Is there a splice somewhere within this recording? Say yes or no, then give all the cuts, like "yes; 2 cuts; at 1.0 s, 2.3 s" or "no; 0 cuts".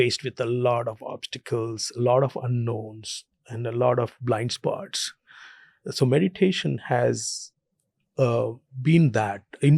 no; 0 cuts